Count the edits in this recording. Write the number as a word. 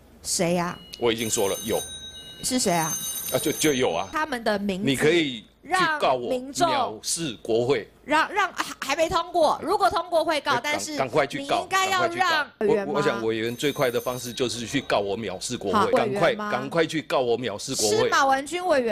three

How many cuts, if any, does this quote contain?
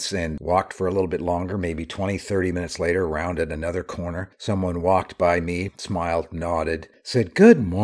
one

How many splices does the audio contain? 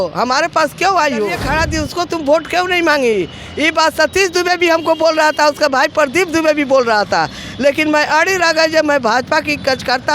one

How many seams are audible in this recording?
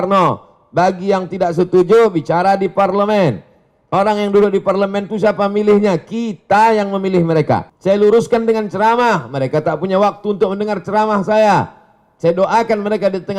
one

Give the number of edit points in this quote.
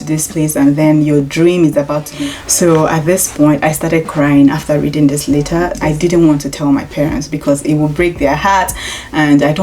two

